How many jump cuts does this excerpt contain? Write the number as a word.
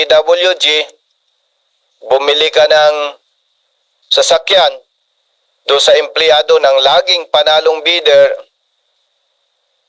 zero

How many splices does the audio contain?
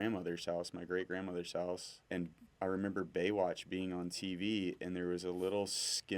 one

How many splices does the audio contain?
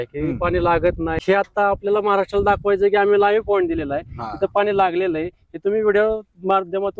one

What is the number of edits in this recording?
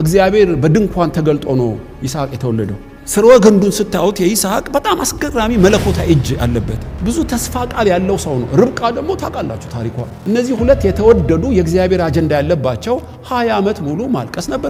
zero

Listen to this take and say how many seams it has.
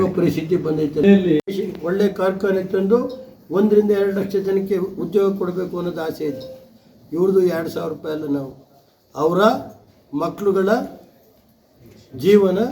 one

